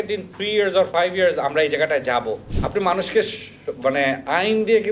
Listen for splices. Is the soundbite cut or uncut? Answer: cut